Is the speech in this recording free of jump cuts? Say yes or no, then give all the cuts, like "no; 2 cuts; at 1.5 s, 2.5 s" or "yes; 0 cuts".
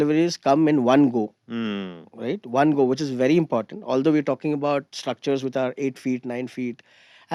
yes; 0 cuts